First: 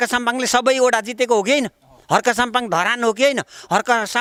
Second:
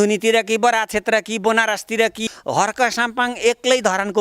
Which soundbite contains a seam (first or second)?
second